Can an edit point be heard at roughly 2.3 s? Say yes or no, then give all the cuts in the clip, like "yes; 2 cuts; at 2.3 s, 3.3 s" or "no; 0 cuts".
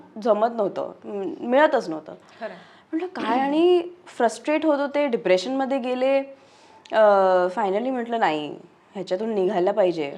no; 0 cuts